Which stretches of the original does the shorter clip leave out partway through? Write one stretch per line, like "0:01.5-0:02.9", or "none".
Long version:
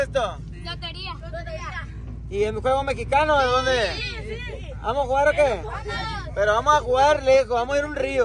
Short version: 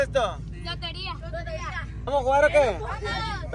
0:02.1-0:04.9